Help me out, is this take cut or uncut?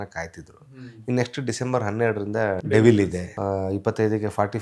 cut